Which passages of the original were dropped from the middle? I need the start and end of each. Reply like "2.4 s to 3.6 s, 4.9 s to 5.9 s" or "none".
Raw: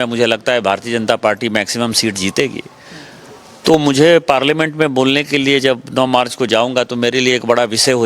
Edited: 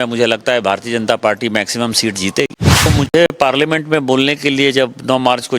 2.9 s to 3.7 s